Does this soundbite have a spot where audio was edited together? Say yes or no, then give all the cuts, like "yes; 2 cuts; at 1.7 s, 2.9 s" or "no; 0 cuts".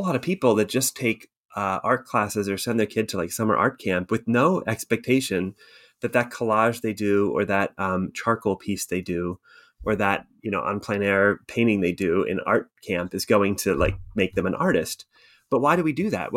no; 0 cuts